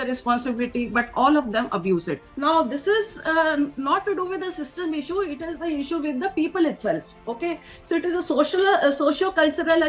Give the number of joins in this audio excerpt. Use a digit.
1